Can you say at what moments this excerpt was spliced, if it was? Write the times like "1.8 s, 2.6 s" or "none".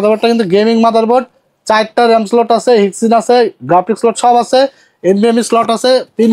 none